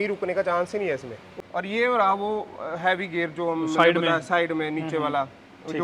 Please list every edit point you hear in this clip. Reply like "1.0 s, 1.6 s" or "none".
1.2 s

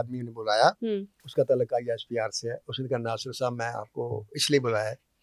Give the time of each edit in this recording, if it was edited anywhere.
1.2 s

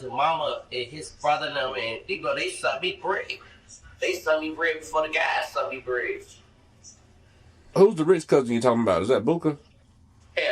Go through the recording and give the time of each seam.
7.7 s

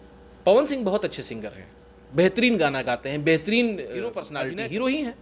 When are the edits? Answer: 4.3 s

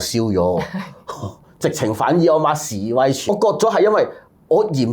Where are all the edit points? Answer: 3.3 s

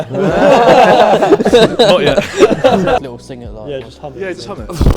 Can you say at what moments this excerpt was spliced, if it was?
3.0 s

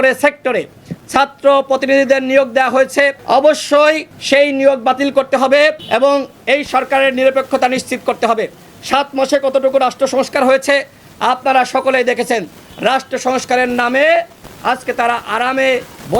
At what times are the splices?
3.2 s, 4.1 s, 5.8 s

